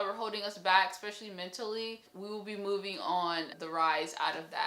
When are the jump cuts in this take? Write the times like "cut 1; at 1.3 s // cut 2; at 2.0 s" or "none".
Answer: cut 1; at 2.1 s // cut 2; at 3.6 s